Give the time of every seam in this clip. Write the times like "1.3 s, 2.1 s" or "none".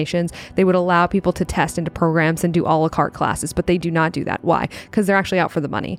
none